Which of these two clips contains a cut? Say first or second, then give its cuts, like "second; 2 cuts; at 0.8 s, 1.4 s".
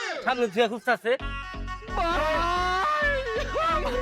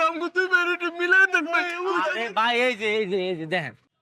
second; 1 cut; at 1.7 s